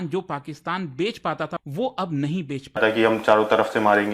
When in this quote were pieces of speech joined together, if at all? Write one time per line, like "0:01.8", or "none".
0:01.6
0:02.8